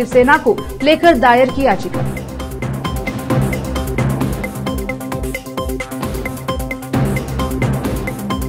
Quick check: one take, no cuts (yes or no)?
yes